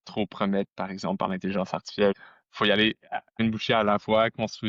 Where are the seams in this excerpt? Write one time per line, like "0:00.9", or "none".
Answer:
0:02.2
0:03.3